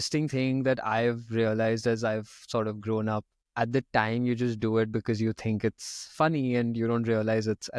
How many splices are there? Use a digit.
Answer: 1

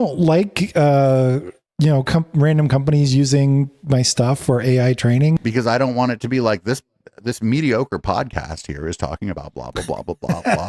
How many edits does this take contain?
1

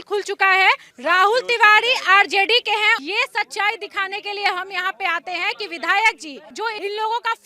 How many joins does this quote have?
1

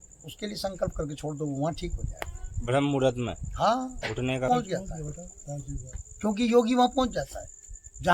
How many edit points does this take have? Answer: 1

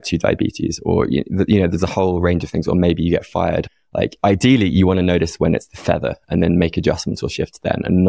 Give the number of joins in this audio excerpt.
1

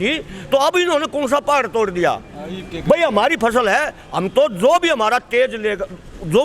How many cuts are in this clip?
0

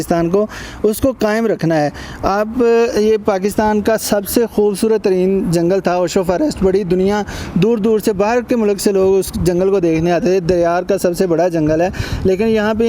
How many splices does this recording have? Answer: 0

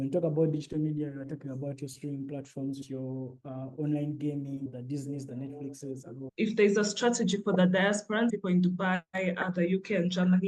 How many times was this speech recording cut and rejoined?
1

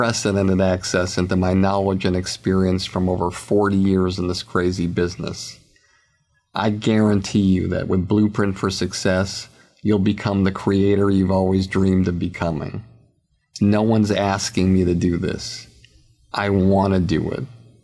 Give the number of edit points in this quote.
0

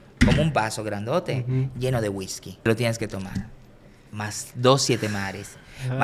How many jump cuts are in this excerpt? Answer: 1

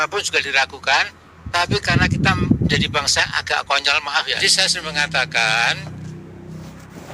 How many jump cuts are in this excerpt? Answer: 1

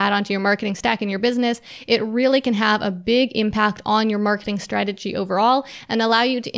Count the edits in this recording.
0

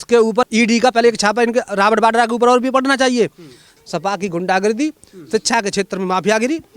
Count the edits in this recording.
1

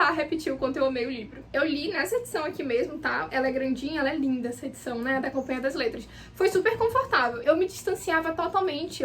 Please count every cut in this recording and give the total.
2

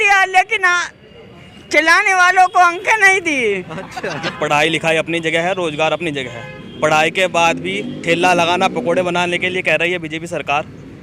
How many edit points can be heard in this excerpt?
1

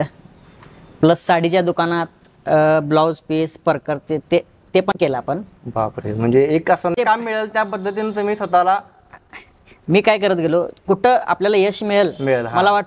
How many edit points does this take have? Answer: 0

